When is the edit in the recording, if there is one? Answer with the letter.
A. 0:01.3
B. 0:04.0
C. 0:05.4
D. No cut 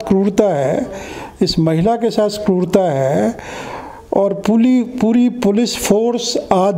D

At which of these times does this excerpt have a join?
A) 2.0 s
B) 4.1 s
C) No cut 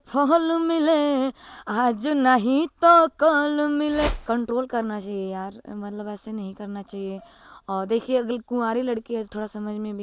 B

